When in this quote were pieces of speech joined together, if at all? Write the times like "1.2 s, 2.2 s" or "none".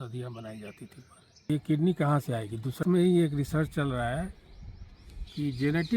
1.5 s, 2.8 s